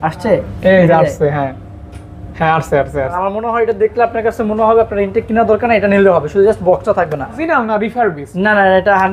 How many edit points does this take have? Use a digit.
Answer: 2